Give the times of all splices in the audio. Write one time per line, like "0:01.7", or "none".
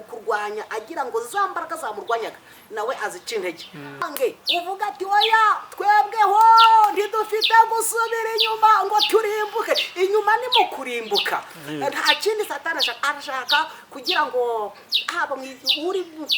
0:04.1

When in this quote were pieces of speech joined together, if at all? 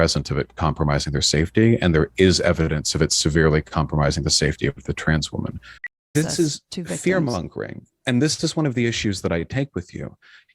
0:06.0

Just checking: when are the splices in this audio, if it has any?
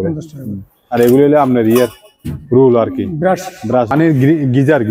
0:03.9

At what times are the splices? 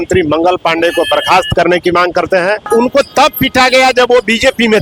0:02.7

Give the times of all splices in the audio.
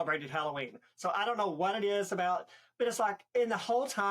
0:03.2

